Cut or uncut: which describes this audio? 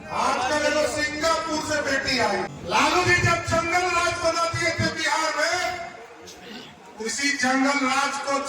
cut